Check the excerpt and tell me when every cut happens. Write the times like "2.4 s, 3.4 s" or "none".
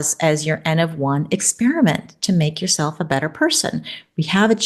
none